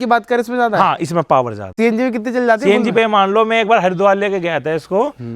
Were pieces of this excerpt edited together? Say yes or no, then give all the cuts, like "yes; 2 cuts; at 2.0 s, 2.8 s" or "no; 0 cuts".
yes; 1 cut; at 1.6 s